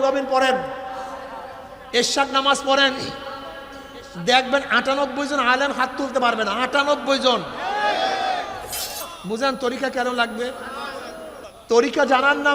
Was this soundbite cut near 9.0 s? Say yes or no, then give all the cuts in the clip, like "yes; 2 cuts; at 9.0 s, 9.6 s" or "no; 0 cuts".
yes; 1 cut; at 9.0 s